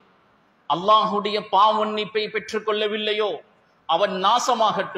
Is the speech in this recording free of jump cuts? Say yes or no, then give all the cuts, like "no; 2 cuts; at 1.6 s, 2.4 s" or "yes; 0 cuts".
yes; 0 cuts